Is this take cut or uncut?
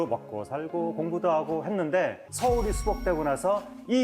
cut